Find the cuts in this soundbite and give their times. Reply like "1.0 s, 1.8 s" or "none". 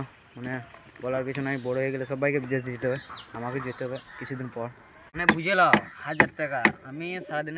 5.2 s

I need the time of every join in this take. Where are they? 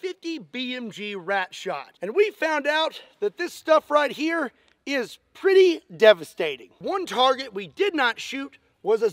1.9 s, 6.8 s

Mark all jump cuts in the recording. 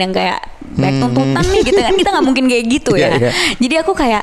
none

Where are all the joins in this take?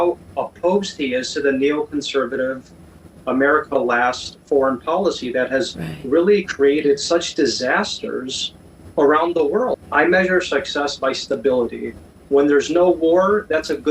9.8 s

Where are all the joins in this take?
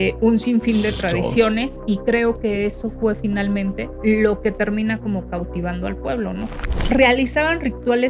3.9 s, 6.8 s

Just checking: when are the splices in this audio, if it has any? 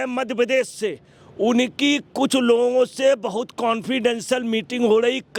none

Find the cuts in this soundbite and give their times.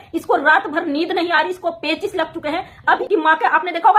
3.0 s

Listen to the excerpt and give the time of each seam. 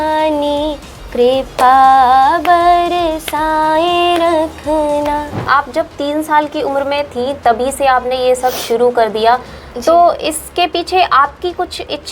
5.5 s

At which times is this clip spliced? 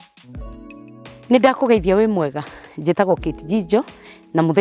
1.2 s

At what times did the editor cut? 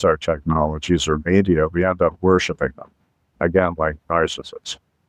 none

